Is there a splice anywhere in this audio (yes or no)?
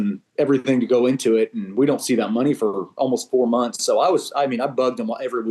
no